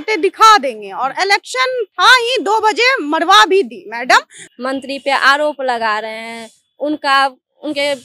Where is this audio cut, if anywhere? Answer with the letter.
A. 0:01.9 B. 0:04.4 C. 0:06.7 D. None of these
B